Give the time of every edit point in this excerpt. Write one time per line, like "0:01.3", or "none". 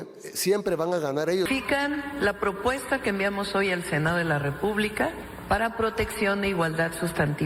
0:01.5
0:05.3